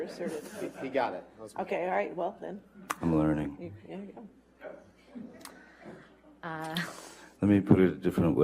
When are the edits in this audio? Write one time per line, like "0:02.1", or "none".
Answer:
none